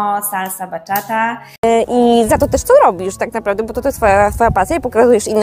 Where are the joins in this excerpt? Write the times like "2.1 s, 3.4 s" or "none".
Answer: 1.6 s